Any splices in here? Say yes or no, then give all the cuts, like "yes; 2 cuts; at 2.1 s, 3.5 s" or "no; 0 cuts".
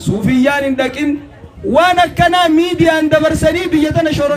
no; 0 cuts